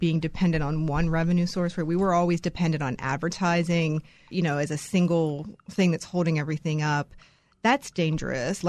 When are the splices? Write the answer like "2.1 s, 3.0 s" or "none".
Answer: 4.3 s

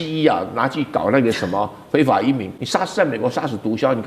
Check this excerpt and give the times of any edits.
2.6 s

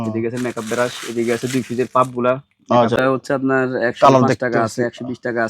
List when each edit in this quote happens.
3.0 s

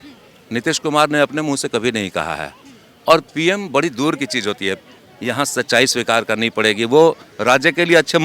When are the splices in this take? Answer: 4.8 s

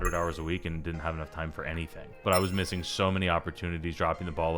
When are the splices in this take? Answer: 2.2 s

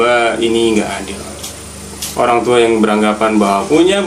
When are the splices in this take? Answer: none

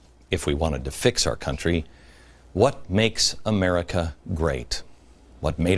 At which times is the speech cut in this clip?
none

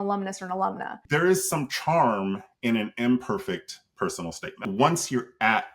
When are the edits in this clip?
0.9 s, 4.6 s

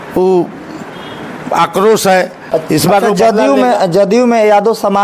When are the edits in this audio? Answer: 2.4 s

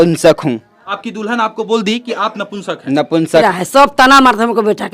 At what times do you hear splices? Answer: 0.9 s, 3.4 s

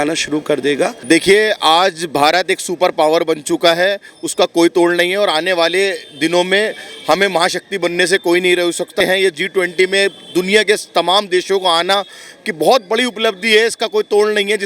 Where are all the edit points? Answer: 1.0 s, 8.9 s

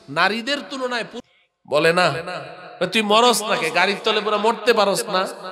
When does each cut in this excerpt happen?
1.1 s

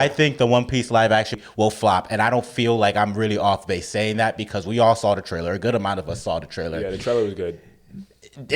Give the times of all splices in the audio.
1.3 s

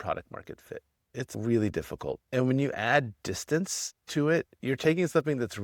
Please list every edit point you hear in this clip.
none

